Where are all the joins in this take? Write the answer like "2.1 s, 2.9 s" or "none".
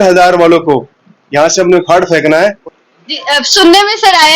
2.6 s